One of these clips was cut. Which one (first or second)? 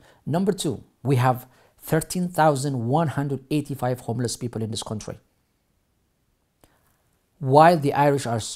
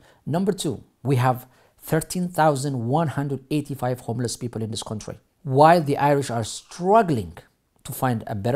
second